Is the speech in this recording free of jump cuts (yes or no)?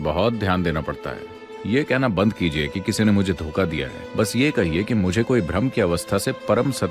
no